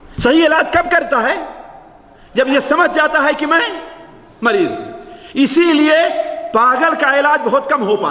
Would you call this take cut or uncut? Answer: uncut